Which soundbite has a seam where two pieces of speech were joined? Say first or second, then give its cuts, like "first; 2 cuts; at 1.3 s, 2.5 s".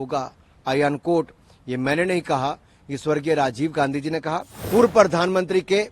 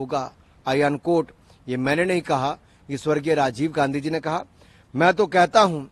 first; 1 cut; at 4.5 s